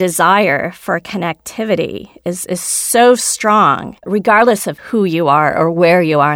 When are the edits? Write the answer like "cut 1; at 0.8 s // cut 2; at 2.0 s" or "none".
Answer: cut 1; at 4.0 s // cut 2; at 4.7 s